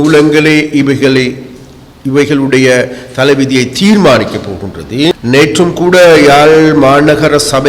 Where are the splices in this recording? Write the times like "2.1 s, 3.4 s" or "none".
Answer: 5.1 s